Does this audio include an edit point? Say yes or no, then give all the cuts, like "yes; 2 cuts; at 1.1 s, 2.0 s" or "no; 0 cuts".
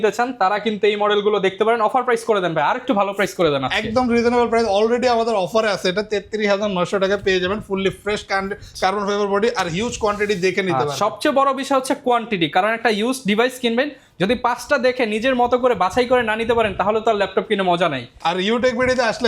no; 0 cuts